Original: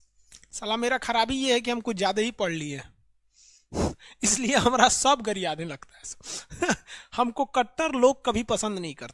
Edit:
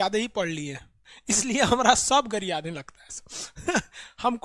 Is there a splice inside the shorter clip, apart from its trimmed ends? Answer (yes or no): yes